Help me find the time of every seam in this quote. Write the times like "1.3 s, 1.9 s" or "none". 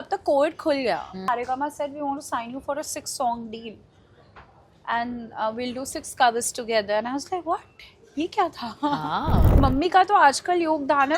1.2 s, 9.5 s